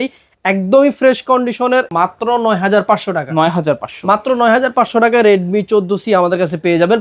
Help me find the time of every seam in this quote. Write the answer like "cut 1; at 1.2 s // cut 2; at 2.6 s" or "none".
cut 1; at 1.9 s